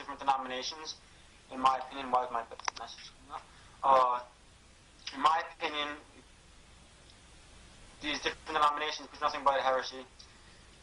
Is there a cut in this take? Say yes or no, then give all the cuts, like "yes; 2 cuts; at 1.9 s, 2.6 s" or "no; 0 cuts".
yes; 1 cut; at 6.6 s